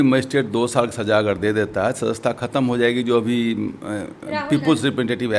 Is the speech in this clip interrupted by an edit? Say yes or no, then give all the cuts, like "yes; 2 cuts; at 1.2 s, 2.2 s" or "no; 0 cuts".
no; 0 cuts